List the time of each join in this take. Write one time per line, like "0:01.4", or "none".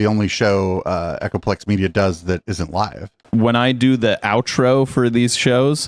0:03.2